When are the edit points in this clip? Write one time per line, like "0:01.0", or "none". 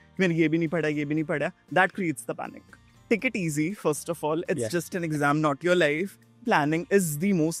0:03.0
0:06.4